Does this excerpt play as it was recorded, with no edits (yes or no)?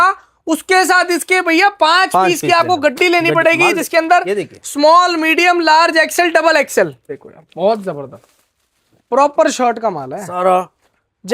no